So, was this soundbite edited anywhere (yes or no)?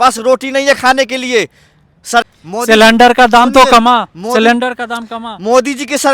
yes